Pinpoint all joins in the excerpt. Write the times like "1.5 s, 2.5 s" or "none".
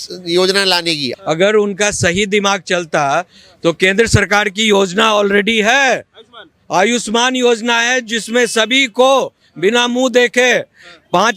1.1 s